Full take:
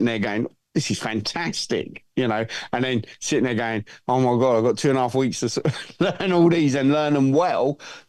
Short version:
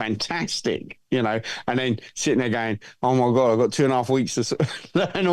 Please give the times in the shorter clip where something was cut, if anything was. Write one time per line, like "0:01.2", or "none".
none